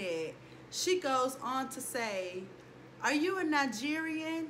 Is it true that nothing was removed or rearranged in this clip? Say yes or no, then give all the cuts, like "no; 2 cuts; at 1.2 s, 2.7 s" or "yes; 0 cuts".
yes; 0 cuts